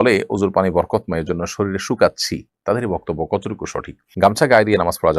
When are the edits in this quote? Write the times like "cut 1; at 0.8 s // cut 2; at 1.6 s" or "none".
cut 1; at 4.1 s